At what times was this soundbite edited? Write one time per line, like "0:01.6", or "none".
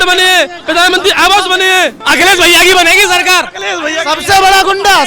0:02.0